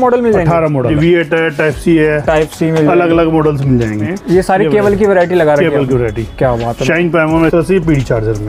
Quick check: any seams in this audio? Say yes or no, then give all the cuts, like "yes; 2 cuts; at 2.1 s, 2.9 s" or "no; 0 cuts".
yes; 3 cuts; at 0.9 s, 4.1 s, 7.5 s